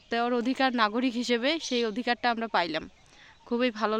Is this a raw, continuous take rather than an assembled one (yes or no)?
yes